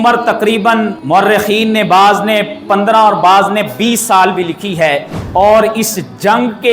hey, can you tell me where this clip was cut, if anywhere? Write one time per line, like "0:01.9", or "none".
0:01.0
0:05.2